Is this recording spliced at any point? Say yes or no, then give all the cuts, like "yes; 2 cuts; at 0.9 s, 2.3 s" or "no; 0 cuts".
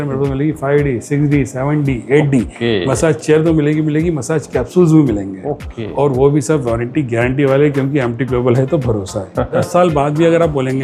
yes; 1 cut; at 9.6 s